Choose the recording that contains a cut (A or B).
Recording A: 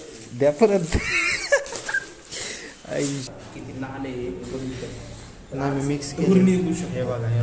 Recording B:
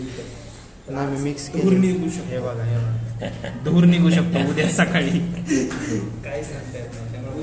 A